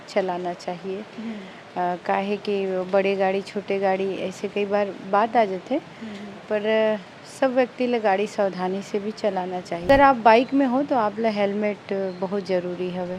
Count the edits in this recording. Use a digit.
1